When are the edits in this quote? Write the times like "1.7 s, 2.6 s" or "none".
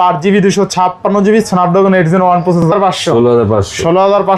2.7 s